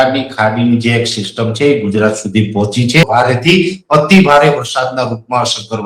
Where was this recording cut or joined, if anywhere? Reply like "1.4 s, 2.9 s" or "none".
3.0 s